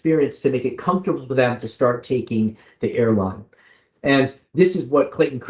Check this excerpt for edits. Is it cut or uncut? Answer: uncut